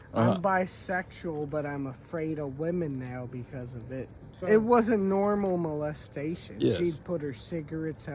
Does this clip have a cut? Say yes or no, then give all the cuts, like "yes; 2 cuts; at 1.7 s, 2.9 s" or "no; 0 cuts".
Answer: yes; 1 cut; at 4.2 s